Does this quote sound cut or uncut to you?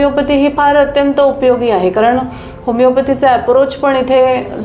uncut